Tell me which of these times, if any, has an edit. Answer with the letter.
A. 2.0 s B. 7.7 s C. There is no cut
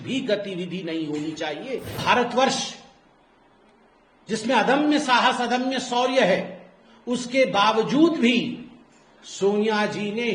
A